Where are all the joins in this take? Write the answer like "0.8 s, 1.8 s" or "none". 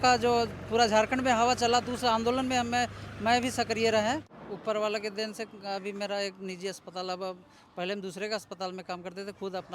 4.3 s